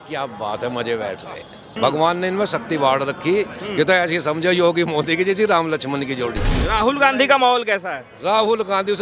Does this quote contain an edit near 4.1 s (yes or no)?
no